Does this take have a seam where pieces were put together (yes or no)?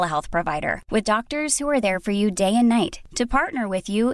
no